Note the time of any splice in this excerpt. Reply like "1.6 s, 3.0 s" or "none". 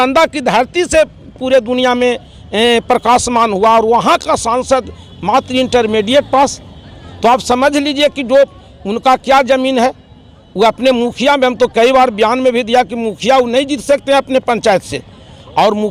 none